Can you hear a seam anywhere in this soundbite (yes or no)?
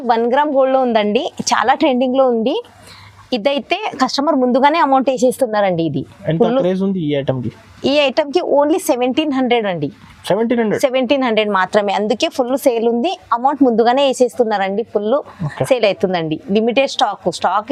no